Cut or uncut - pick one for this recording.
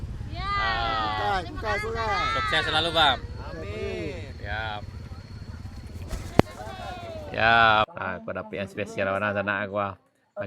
cut